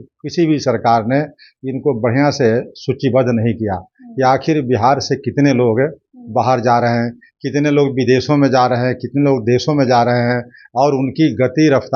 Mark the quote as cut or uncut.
uncut